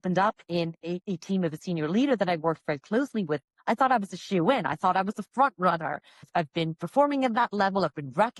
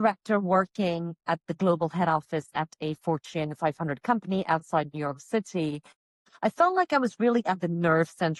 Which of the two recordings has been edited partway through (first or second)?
second